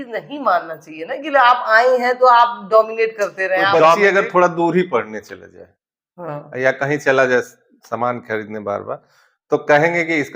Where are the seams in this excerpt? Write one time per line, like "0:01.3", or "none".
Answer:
0:04.0